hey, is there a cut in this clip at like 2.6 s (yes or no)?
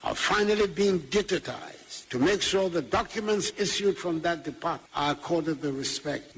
no